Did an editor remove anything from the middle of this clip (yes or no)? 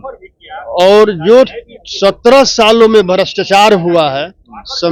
no